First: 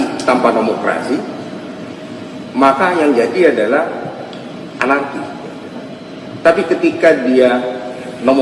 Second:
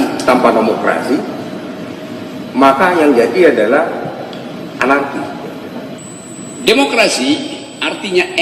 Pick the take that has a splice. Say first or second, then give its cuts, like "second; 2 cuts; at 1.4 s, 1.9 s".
second; 1 cut; at 6.0 s